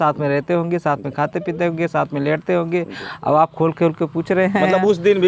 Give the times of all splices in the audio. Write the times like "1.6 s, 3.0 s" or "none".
none